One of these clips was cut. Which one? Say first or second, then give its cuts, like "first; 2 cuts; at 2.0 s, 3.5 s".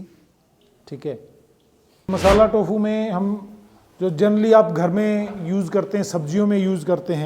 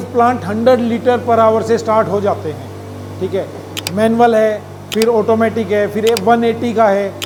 first; 1 cut; at 2.1 s